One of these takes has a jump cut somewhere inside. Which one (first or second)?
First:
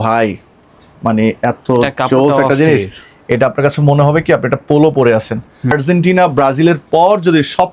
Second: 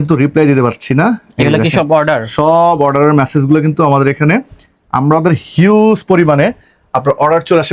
first